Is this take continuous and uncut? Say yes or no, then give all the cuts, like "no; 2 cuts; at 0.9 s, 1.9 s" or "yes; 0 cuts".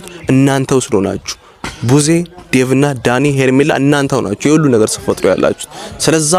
yes; 0 cuts